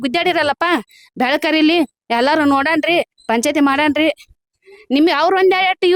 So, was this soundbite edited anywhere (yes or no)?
no